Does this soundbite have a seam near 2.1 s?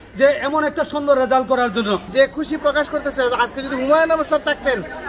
yes; 1 cut; at 2.1 s

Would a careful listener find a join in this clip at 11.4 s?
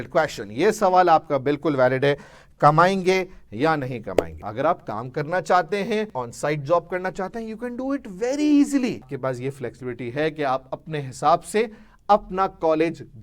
no; 3 cuts; at 4.4 s, 6.2 s, 9.1 s

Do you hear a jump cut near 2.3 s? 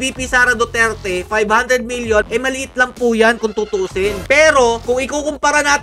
yes; 2 cuts; at 2.3 s, 4.2 s

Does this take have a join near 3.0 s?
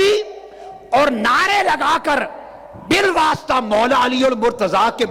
no; 0 cuts

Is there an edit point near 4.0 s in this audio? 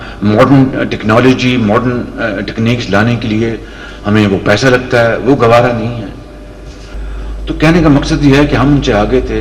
no; 1 cut; at 6.8 s

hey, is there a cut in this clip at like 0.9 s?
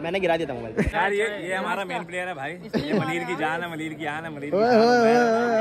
yes; 1 cut; at 0.9 s

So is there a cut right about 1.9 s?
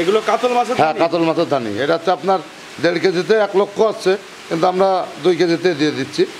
no; 0 cuts

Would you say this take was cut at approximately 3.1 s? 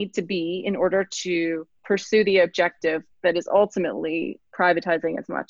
no; 1 cut; at 1.7 s

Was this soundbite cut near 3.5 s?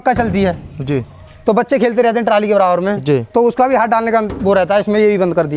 no; 0 cuts

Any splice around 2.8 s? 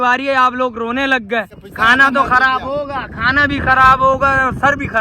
no; 1 cut; at 1.5 s

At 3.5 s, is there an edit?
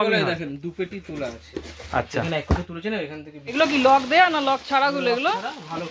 yes; 1 cut; at 3.5 s

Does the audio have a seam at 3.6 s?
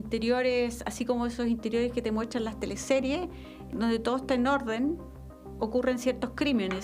yes; 1 cut; at 3.6 s

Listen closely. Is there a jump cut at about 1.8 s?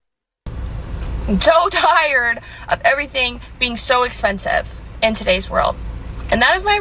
no; 0 cuts

